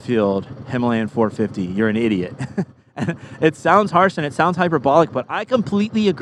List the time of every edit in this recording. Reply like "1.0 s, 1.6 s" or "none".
none